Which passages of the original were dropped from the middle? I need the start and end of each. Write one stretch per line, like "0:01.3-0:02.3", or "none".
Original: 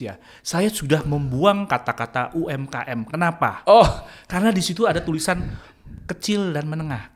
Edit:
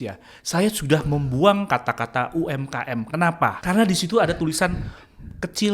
0:03.5-0:04.2

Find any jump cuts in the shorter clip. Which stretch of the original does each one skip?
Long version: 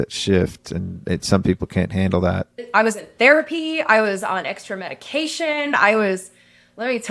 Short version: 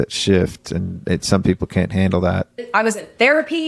none

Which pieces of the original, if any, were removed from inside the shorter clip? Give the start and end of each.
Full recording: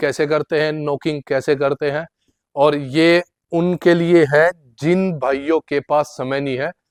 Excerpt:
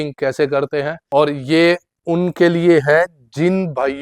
0:02.1-0:02.4

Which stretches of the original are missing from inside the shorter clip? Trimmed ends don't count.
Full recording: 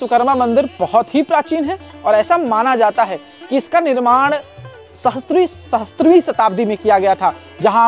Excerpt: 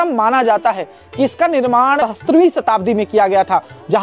0:04.3-0:05.7

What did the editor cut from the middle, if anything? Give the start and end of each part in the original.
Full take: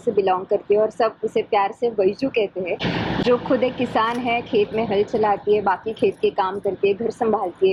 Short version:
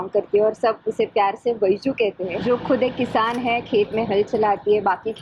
0:02.7-0:03.2

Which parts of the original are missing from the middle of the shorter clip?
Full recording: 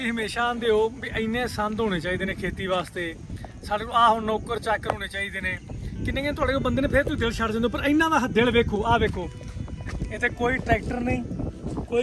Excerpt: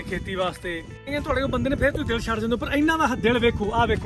0:03.4-0:06.2

